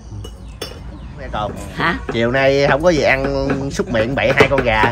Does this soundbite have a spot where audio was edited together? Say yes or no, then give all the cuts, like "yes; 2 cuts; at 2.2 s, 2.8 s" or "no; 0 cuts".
yes; 1 cut; at 1.6 s